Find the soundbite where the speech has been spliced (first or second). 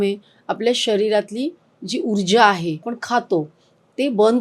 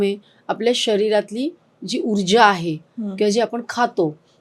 first